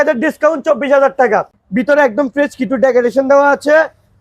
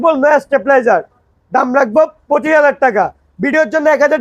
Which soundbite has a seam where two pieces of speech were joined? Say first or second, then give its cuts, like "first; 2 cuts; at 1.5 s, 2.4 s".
first; 1 cut; at 1.6 s